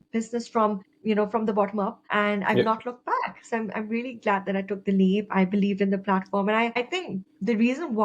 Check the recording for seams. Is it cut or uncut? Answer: cut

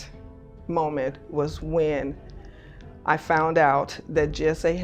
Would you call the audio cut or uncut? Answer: uncut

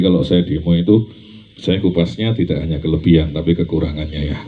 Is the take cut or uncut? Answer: uncut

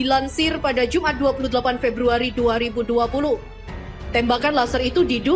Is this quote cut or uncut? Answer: uncut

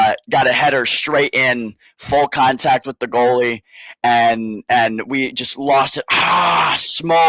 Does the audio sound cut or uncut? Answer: uncut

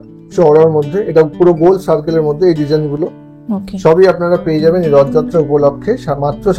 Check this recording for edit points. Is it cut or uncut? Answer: uncut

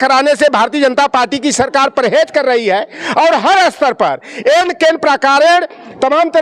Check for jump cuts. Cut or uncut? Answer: uncut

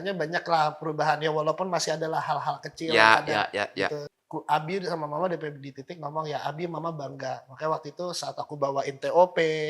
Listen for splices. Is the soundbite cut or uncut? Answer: cut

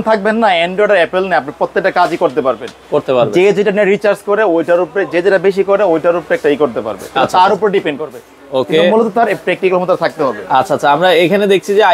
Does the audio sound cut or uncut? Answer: uncut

